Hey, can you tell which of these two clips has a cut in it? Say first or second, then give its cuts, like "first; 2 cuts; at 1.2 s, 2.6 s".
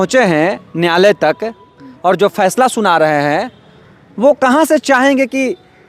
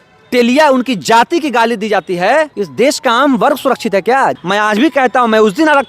second; 2 cuts; at 2.6 s, 4.4 s